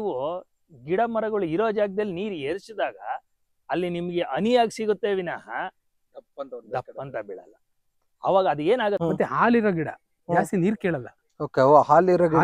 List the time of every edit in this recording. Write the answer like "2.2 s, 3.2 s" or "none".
9.0 s